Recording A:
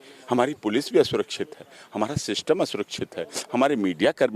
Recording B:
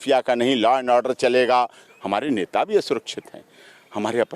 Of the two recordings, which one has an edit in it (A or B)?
B